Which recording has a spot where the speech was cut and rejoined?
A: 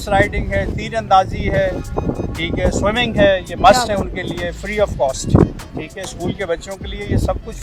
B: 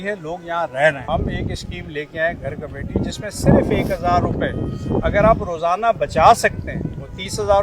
B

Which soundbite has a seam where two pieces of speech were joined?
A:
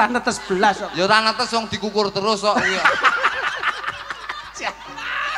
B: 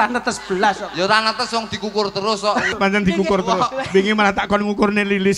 B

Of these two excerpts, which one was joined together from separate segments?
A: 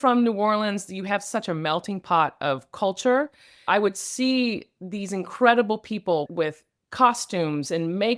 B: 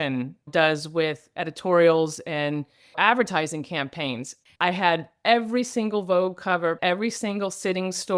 B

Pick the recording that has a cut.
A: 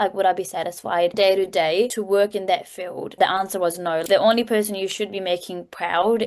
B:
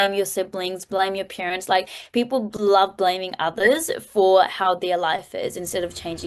A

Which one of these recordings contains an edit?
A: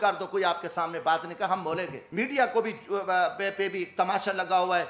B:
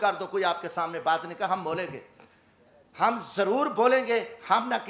A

